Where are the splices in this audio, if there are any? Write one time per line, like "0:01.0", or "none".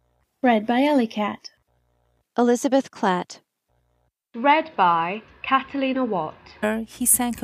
none